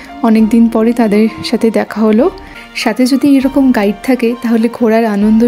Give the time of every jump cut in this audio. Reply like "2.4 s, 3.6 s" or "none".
2.6 s